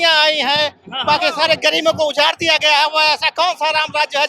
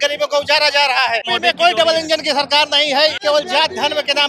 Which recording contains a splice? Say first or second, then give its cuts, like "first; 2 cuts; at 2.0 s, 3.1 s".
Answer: second; 2 cuts; at 1.3 s, 3.2 s